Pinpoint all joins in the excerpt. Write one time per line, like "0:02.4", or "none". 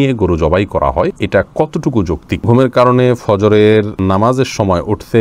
0:01.2
0:02.5
0:03.9